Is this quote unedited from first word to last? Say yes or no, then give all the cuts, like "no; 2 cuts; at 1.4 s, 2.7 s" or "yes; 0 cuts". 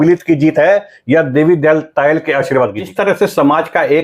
no; 1 cut; at 2.8 s